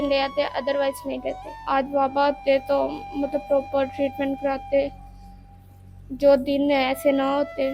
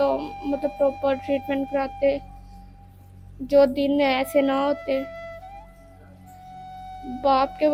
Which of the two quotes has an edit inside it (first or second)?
first